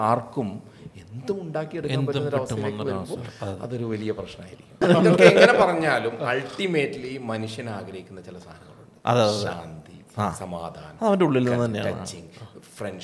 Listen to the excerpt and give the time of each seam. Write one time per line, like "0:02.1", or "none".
0:04.8